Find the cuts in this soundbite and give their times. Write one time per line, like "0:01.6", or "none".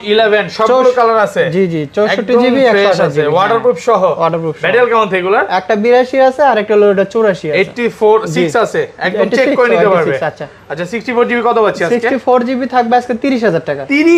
none